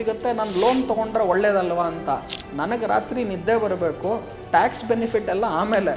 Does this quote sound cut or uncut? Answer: uncut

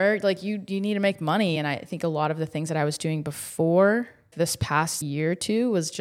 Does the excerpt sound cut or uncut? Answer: cut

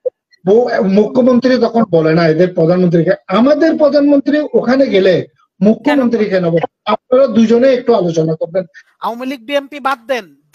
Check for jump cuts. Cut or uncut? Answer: cut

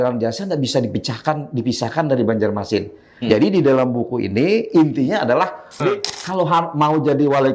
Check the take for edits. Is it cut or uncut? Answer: cut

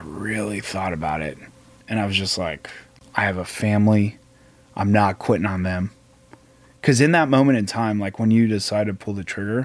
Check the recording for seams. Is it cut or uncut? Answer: cut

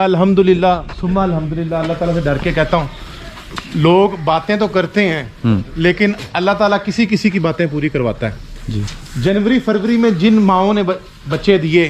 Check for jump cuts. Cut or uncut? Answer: uncut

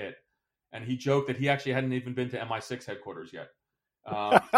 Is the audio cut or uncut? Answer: uncut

